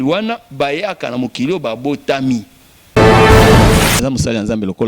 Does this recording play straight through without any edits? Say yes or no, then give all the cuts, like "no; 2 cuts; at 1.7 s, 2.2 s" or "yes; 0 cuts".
no; 2 cuts; at 2.9 s, 4.0 s